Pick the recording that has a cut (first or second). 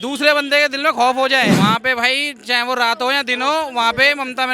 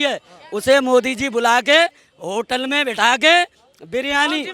first